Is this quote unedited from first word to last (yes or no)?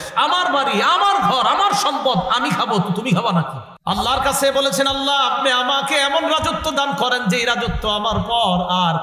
no